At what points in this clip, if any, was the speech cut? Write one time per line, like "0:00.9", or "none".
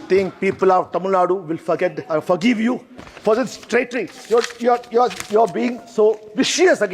none

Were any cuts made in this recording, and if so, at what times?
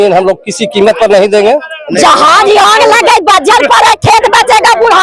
0:01.9

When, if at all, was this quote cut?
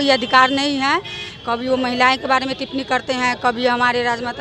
none

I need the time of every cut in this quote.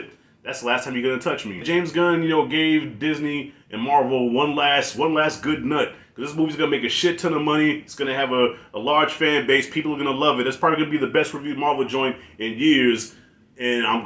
0:01.6

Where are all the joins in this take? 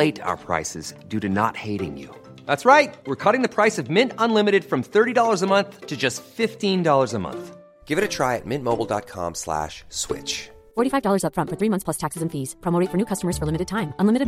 none

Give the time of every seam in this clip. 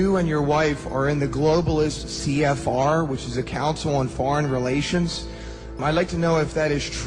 0:02.1

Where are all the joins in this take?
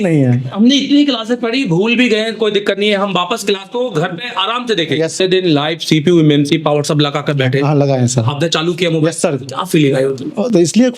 0:05.2

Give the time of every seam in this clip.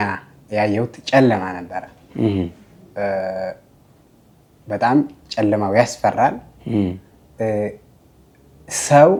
none

